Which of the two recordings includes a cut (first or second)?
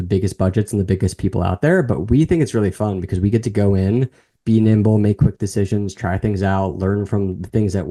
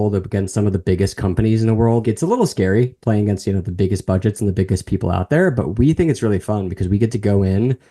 second